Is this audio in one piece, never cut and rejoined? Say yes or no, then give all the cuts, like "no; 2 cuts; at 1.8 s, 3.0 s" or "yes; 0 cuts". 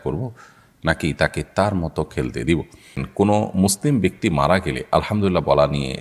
no; 1 cut; at 3.0 s